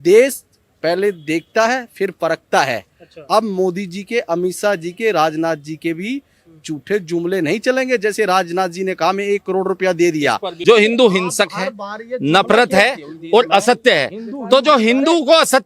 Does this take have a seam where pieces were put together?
yes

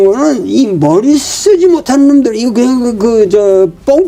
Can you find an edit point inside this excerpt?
no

